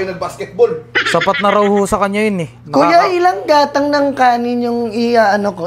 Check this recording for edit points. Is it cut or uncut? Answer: uncut